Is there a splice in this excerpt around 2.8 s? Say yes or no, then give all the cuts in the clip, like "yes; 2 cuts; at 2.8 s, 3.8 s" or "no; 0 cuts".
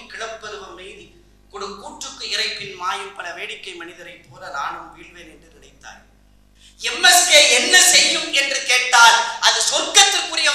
no; 1 cut; at 6.6 s